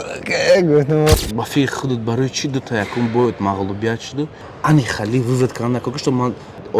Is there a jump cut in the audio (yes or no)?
yes